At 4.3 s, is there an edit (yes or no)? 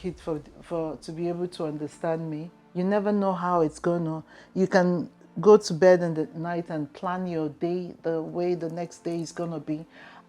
no